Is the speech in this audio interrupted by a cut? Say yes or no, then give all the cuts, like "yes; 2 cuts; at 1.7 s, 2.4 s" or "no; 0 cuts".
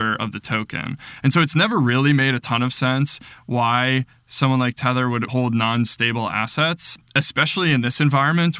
yes; 2 cuts; at 5.3 s, 7.0 s